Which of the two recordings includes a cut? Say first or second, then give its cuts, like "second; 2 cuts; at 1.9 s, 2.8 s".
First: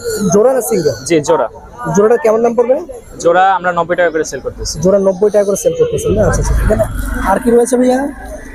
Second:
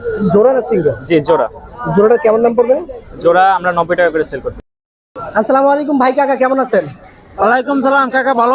second; 1 cut; at 4.7 s